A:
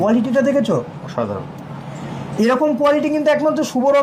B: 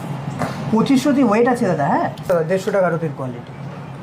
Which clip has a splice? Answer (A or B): B